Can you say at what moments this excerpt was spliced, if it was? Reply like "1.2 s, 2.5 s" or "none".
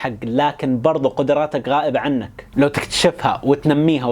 none